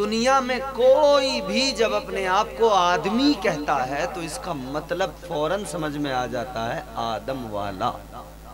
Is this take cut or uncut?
uncut